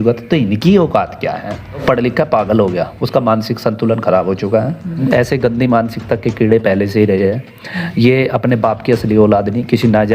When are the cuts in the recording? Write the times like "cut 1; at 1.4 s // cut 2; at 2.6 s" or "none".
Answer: cut 1; at 1.8 s // cut 2; at 5.0 s